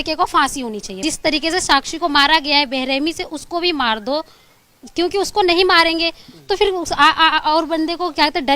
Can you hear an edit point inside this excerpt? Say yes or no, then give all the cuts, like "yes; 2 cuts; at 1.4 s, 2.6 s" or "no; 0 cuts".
yes; 1 cut; at 1.0 s